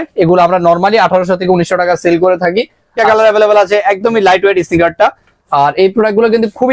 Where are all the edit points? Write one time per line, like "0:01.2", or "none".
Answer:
0:03.0